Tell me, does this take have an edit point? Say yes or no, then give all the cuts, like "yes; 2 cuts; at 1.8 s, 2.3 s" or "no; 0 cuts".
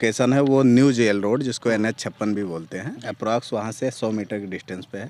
no; 0 cuts